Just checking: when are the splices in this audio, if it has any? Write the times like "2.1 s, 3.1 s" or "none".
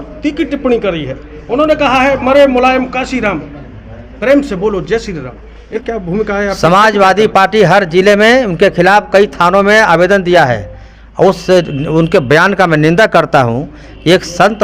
5.8 s